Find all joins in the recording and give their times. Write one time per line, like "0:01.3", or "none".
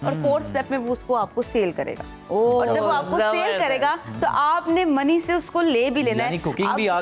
none